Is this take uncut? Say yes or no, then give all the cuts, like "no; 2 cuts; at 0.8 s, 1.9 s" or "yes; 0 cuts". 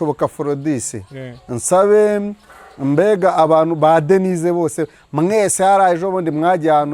yes; 0 cuts